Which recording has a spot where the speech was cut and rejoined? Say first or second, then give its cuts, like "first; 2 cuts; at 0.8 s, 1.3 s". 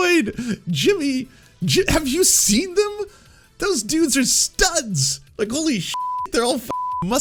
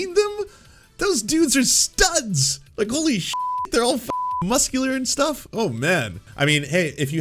second; 1 cut; at 6.3 s